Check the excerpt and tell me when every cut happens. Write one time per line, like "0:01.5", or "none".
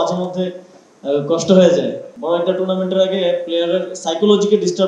0:02.1